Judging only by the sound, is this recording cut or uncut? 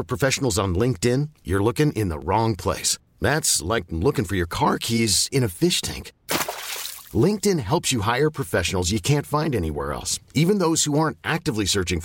uncut